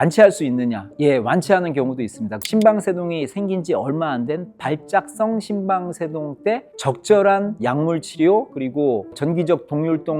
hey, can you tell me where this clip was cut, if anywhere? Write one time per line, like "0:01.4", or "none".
0:02.4